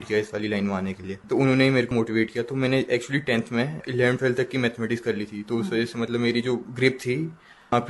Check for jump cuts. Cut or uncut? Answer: cut